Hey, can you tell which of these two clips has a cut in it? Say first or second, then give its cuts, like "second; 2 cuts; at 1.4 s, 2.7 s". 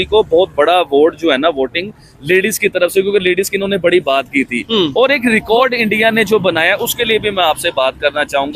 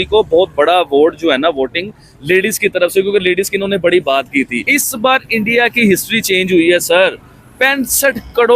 second; 1 cut; at 4.6 s